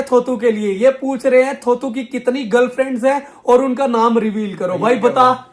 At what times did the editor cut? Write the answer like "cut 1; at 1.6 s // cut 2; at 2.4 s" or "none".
none